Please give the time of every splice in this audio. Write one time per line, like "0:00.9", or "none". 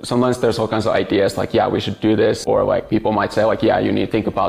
none

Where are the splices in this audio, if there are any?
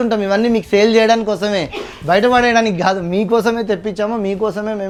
none

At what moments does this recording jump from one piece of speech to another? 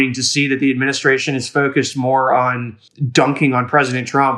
none

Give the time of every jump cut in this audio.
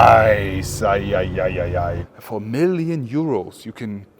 0:02.1

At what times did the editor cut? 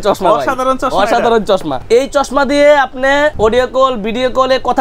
0:01.8
0:03.3

